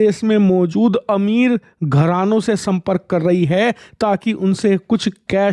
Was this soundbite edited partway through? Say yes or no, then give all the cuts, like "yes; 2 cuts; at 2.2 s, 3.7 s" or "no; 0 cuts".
no; 0 cuts